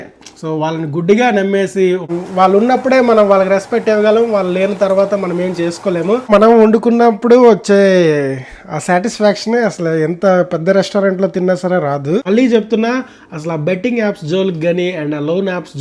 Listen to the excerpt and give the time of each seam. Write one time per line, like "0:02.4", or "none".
0:02.1
0:06.3
0:12.2